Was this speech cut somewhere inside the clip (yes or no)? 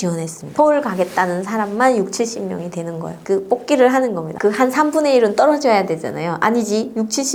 no